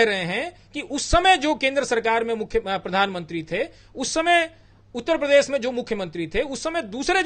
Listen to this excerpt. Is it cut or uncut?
uncut